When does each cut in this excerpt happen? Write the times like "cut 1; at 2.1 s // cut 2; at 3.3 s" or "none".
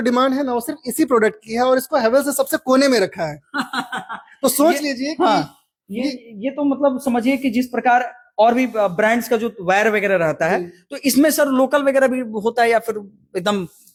none